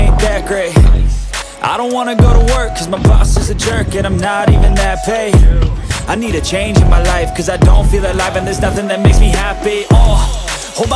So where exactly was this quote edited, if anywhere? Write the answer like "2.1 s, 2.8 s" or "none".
none